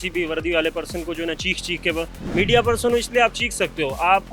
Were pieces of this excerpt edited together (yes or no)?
no